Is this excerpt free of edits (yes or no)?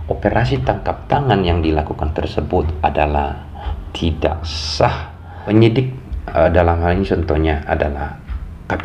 no